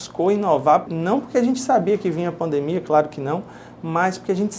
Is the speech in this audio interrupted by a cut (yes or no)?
yes